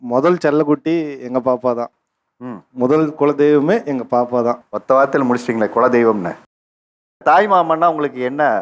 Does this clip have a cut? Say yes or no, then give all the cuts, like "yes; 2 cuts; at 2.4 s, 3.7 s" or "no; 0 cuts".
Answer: yes; 1 cut; at 7.2 s